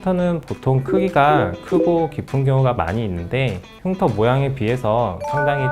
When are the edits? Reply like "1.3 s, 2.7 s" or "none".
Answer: none